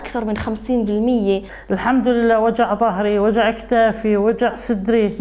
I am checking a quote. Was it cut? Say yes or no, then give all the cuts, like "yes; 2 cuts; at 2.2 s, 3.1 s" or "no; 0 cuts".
yes; 1 cut; at 1.5 s